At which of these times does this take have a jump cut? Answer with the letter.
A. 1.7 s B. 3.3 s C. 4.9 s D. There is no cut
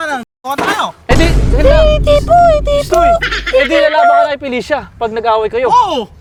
D